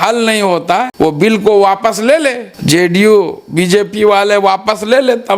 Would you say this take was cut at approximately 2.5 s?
yes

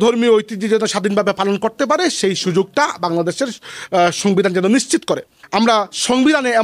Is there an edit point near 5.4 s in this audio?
yes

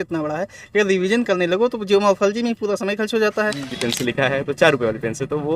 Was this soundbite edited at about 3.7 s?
yes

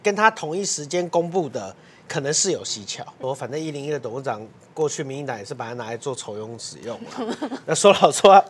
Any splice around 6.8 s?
no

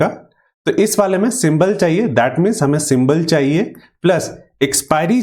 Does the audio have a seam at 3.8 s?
no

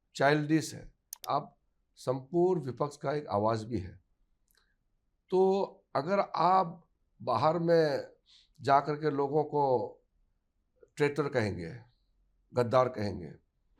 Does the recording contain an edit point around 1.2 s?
yes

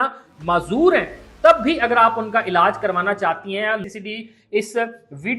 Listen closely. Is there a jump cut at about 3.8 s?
yes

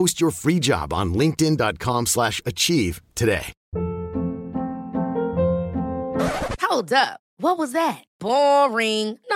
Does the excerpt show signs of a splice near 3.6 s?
yes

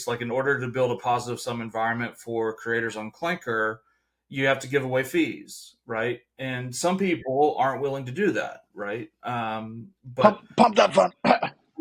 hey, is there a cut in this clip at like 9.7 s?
no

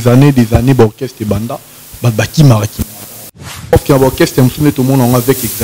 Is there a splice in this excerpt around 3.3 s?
yes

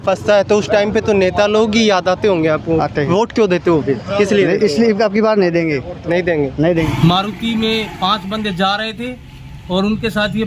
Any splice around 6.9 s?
yes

